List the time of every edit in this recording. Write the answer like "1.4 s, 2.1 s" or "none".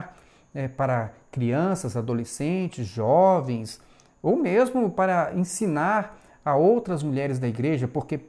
none